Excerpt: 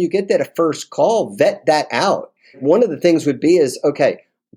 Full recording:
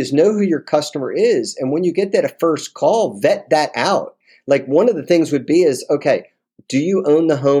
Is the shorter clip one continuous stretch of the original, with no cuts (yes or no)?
no